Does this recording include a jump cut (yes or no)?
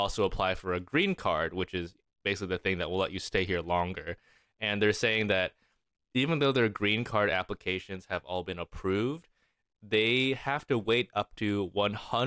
no